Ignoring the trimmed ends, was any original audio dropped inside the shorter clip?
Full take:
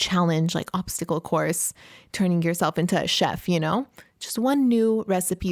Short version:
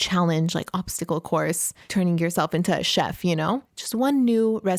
yes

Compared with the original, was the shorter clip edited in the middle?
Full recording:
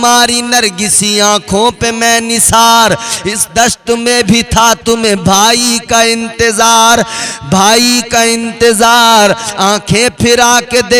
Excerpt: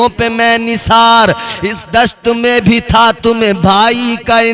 no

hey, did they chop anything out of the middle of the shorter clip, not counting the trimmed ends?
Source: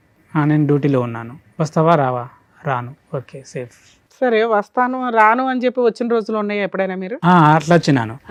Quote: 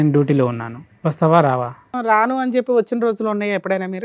yes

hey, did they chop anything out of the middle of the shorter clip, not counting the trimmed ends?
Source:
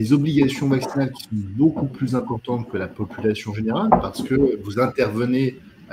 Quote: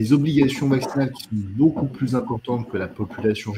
no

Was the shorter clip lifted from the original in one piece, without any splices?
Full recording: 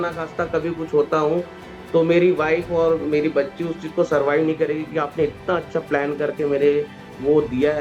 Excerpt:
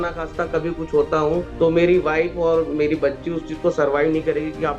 no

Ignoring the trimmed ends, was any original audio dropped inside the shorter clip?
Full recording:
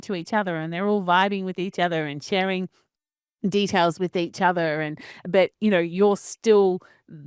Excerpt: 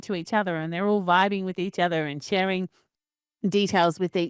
no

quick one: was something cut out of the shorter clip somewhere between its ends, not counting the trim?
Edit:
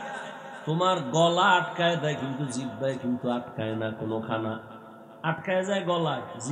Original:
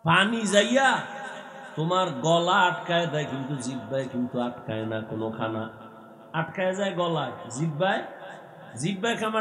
no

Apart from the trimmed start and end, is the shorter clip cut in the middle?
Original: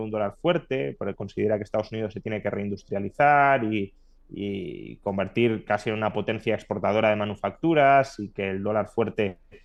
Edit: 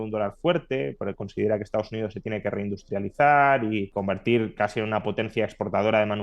yes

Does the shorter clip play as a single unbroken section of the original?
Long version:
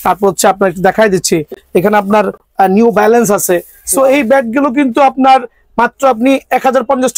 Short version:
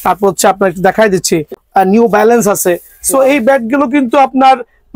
no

